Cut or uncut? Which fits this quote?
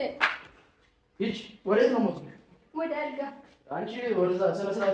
uncut